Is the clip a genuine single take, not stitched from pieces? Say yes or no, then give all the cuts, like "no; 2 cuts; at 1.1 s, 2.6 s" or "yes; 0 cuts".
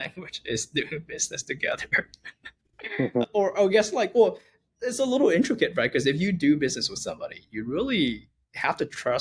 yes; 0 cuts